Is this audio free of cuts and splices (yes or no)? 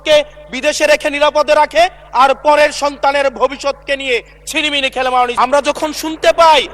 no